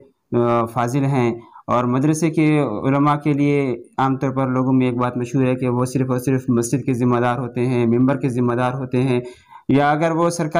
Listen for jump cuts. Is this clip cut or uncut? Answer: uncut